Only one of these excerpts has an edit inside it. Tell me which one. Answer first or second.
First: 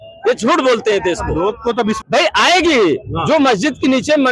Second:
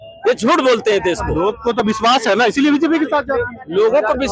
first